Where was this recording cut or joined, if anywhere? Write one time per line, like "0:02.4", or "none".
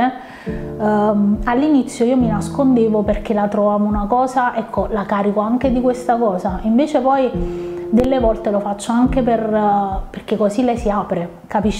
none